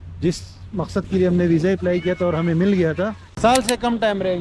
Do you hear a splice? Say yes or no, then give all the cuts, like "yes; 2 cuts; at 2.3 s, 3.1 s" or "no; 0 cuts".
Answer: yes; 1 cut; at 3.4 s